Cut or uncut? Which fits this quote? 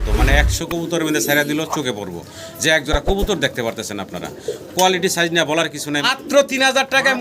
cut